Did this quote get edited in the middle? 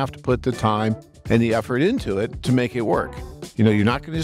yes; 2 cuts; at 2.4 s, 3.4 s

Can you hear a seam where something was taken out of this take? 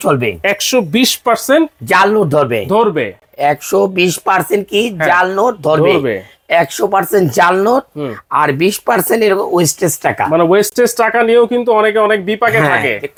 no; 0 cuts

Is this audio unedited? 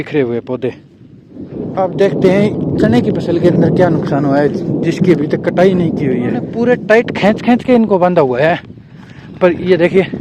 no; 2 cuts; at 1.6 s, 6.5 s

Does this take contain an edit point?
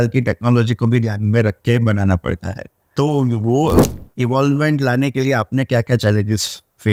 no; 0 cuts

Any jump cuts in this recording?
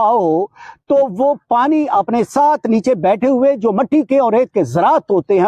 no; 0 cuts

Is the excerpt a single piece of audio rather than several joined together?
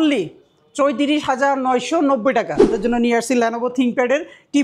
no; 1 cut; at 2.7 s

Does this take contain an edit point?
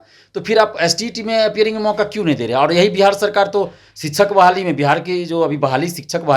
no; 0 cuts

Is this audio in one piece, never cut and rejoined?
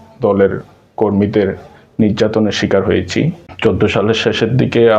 no; 1 cut; at 3.5 s

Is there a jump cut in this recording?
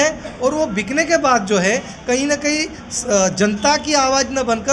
no; 0 cuts

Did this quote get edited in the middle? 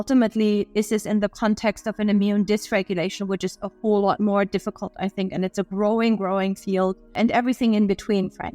yes; 1 cut; at 7.1 s

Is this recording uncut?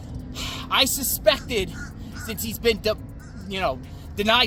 yes; 0 cuts

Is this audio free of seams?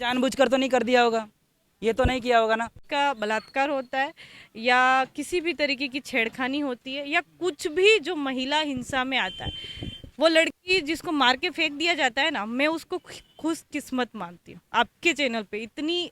no; 1 cut; at 2.8 s

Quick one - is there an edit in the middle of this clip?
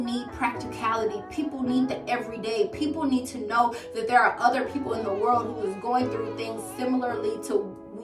no; 0 cuts

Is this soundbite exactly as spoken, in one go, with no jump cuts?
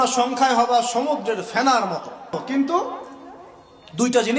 no; 1 cut; at 2.4 s

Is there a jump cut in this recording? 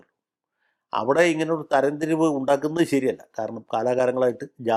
no; 0 cuts

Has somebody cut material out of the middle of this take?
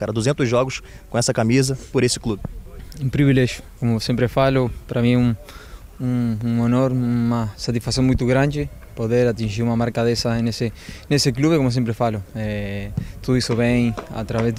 no; 0 cuts

